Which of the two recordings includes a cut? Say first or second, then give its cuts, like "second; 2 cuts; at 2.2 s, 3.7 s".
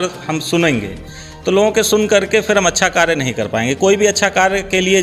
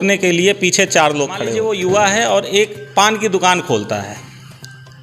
second; 1 cut; at 1.5 s